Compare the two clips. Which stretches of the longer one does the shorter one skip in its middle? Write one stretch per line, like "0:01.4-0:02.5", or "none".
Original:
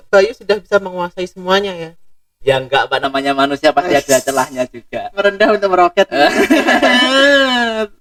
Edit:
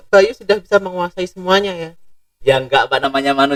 none